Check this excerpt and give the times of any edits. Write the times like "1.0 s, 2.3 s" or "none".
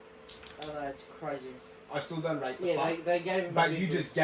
1.8 s